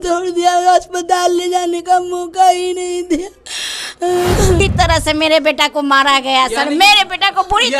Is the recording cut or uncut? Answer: cut